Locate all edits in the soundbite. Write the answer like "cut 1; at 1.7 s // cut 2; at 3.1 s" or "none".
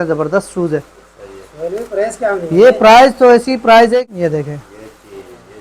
cut 1; at 4.0 s